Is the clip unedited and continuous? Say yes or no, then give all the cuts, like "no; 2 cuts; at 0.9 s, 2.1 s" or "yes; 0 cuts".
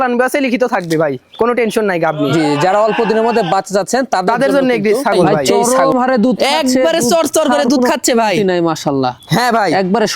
no; 1 cut; at 5.6 s